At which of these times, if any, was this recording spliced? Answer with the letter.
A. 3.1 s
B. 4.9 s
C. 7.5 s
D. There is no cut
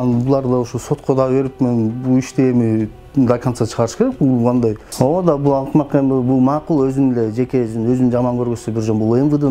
B